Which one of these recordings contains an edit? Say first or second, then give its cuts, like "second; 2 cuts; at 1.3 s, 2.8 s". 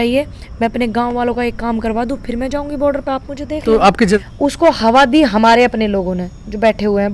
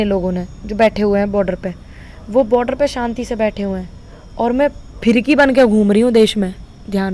first; 1 cut; at 4.2 s